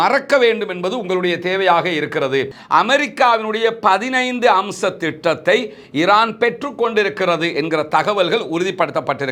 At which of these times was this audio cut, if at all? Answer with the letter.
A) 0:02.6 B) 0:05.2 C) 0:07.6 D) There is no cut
A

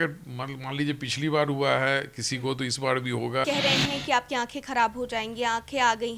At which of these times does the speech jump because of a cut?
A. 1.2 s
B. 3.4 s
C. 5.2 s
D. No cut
B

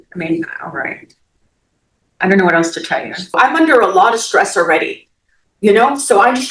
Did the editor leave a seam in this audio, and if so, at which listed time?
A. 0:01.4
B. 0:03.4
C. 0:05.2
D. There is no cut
B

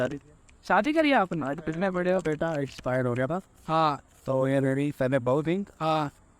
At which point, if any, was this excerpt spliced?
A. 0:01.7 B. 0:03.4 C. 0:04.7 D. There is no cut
A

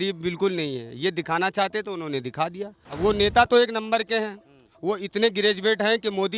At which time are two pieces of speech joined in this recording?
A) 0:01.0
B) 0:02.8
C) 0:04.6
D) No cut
B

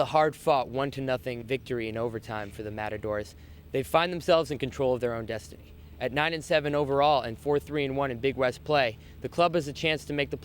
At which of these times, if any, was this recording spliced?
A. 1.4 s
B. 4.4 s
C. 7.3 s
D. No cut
A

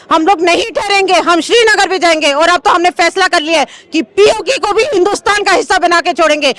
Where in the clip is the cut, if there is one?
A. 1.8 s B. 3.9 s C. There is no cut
C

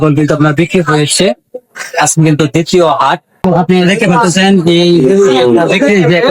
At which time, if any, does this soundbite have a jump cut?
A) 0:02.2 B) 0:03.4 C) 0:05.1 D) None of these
B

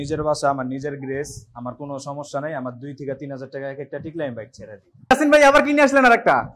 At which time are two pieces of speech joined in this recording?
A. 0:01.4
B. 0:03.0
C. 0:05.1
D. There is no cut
C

